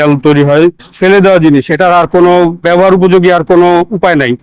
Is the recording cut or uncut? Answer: uncut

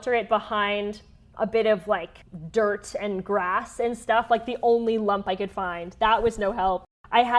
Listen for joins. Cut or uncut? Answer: uncut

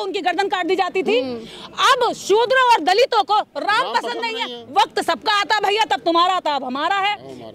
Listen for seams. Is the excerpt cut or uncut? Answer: uncut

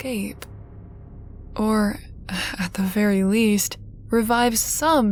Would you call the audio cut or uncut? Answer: uncut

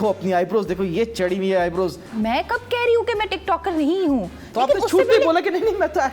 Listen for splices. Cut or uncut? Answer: cut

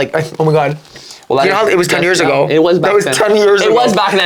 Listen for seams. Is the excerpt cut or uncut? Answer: uncut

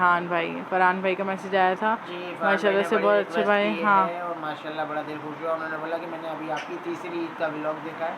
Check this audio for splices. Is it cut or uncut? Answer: uncut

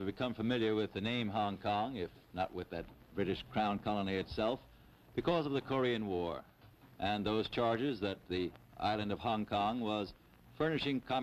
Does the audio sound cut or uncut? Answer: uncut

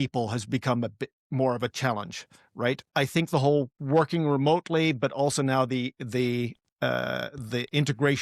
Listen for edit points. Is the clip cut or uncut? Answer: cut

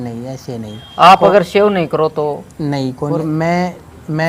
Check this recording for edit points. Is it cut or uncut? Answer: cut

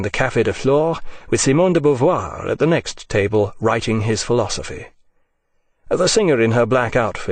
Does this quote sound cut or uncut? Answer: uncut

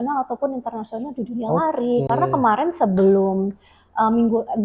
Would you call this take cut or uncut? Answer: uncut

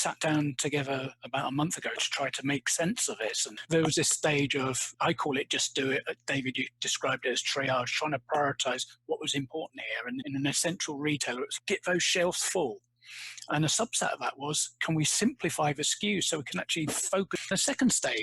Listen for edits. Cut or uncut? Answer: cut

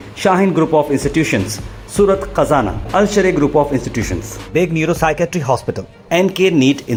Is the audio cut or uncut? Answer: uncut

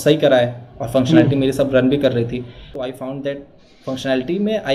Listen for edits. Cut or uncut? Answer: cut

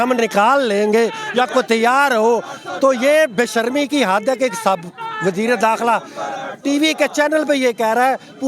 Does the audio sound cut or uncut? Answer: uncut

